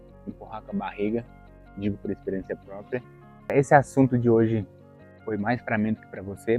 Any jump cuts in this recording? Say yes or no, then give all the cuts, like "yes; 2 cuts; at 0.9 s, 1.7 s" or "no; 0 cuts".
yes; 1 cut; at 3.6 s